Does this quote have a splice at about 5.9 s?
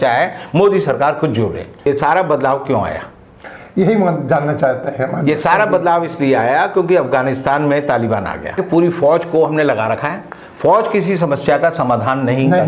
no; 2 cuts; at 1.9 s, 8.6 s

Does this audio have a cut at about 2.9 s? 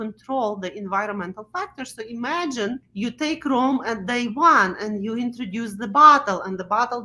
yes; 1 cut; at 2.9 s

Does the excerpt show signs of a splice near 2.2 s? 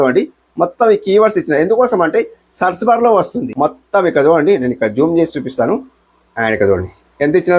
no; 1 cut; at 3.4 s

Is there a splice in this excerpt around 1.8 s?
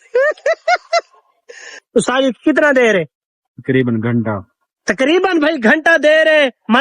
yes; 1 cut; at 1.8 s

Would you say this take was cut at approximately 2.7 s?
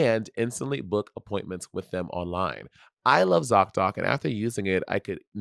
yes; 1 cut; at 2.7 s

